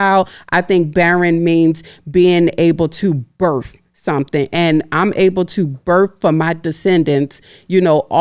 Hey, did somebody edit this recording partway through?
no; 0 cuts

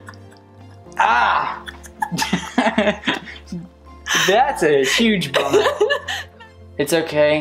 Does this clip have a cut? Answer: yes; 1 cut; at 6.2 s

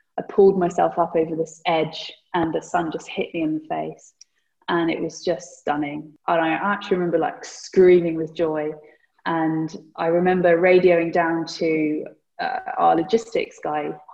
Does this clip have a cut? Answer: yes; 1 cut; at 6.1 s

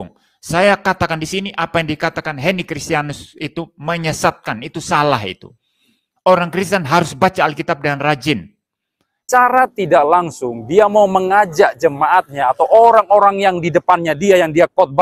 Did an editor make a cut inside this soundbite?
yes; 1 cut; at 9.2 s

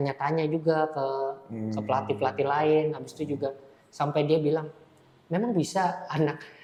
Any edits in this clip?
no; 0 cuts

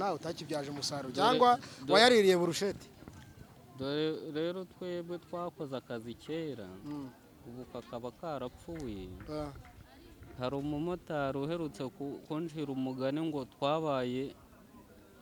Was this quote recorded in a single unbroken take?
yes; 0 cuts

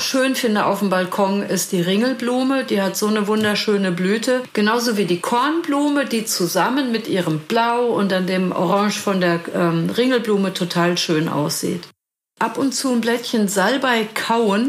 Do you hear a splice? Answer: yes; 2 cuts; at 4.5 s, 12.3 s

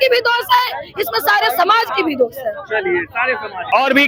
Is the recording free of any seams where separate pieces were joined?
yes; 0 cuts

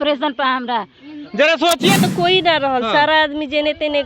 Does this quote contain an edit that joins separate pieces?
yes; 1 cut; at 2.0 s

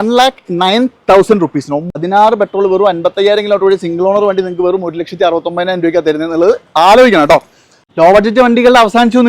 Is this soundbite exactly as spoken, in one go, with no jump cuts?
no; 2 cuts; at 2.0 s, 7.8 s

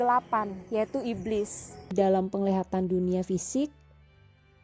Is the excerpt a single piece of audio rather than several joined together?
no; 1 cut; at 1.9 s

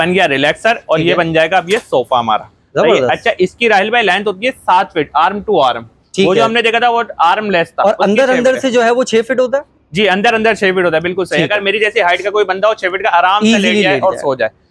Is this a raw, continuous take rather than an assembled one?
yes; 0 cuts

